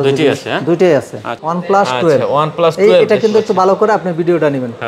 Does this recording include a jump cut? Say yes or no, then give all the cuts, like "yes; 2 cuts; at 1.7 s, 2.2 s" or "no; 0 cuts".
yes; 1 cut; at 1.3 s